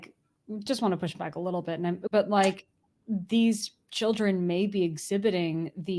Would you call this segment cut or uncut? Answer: cut